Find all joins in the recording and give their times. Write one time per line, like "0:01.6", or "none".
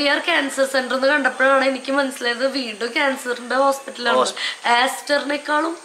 0:04.4